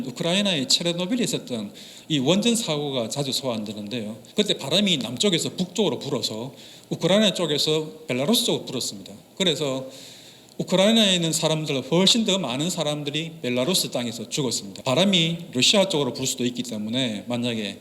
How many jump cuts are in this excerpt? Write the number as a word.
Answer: two